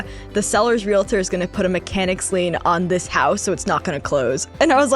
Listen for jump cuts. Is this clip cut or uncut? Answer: uncut